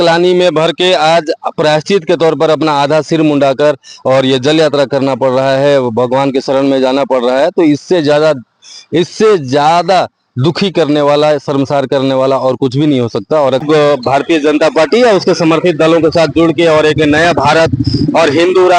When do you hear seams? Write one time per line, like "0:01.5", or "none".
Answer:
0:13.6